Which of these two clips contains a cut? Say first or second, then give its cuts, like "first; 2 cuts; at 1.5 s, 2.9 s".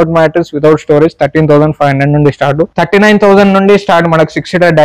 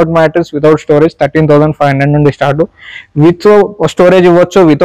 first; 1 cut; at 2.7 s